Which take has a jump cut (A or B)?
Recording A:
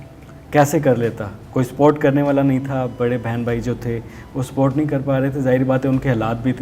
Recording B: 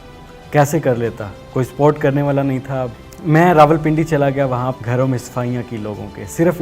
B